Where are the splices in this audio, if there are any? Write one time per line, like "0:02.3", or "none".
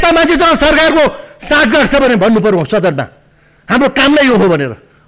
none